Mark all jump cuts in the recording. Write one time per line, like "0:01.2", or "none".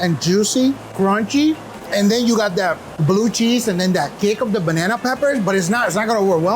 0:00.9
0:01.7
0:02.9